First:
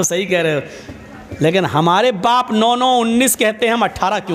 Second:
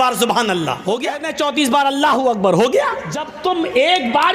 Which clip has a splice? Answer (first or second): second